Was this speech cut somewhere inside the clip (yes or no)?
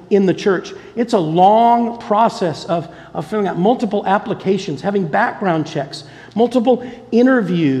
no